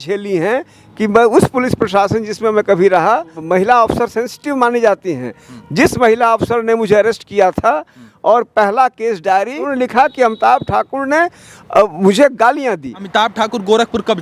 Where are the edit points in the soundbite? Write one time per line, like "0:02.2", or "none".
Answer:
0:03.4
0:09.7
0:13.0